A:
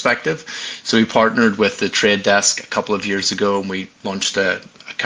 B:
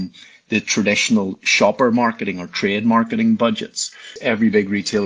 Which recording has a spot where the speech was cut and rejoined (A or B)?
B